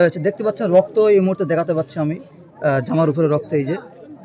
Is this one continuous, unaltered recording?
yes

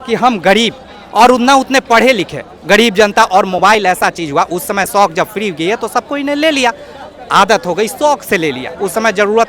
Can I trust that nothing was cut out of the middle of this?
yes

